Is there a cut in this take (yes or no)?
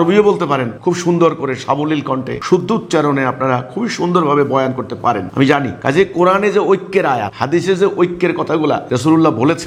no